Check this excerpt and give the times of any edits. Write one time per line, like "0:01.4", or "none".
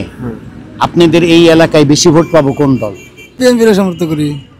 0:03.4

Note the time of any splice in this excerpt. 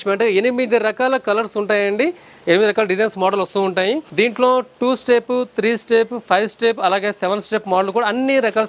0:04.1

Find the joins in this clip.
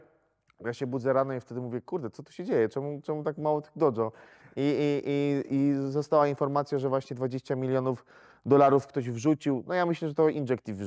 none

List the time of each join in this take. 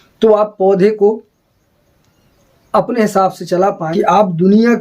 0:03.9

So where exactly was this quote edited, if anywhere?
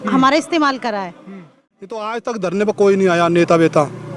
0:02.0

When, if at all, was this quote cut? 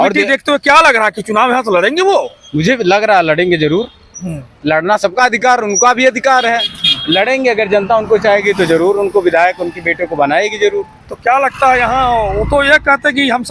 none

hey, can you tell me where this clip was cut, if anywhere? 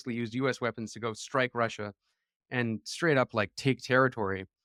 none

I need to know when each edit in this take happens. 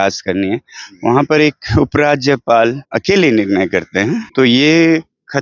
0:02.9
0:04.2

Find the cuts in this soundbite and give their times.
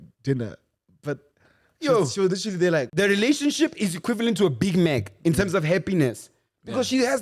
0:02.9

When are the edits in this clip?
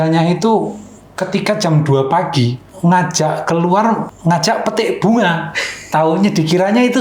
0:02.6
0:04.1

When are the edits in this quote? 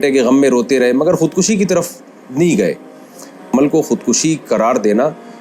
0:03.5

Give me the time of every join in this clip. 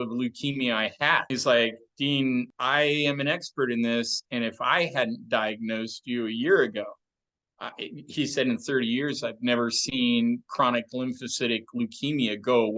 0:01.3
0:02.6

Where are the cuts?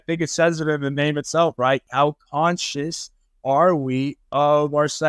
0:01.9

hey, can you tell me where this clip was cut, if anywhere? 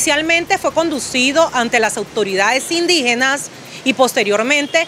none

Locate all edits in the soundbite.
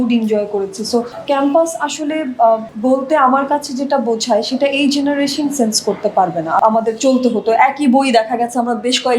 0:01.1
0:02.7
0:06.6

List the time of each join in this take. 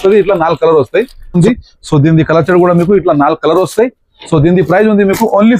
0:01.3

